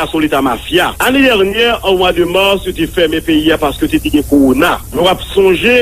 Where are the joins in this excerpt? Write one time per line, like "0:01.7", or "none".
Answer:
0:01.0
0:04.8